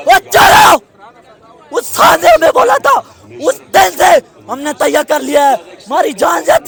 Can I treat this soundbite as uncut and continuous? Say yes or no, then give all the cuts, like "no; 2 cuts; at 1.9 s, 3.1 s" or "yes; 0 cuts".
yes; 0 cuts